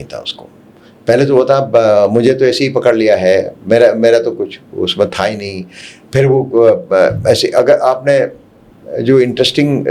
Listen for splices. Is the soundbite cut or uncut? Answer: uncut